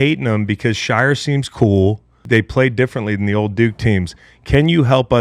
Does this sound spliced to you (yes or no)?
yes